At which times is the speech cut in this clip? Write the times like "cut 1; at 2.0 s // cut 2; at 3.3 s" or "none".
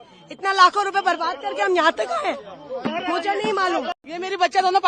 none